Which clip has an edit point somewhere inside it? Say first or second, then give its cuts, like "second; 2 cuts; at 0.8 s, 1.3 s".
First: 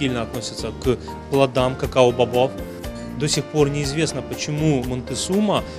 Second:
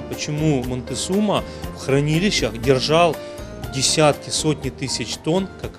first; 1 cut; at 3.0 s